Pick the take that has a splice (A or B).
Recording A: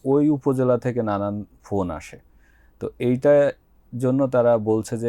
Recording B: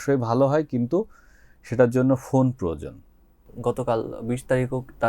B